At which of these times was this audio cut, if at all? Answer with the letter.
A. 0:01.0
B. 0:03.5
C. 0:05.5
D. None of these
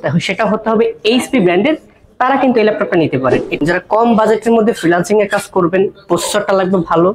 B